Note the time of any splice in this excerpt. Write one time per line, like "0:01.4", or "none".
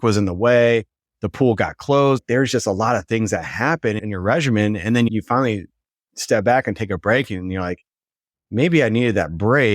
0:02.2
0:04.0
0:05.1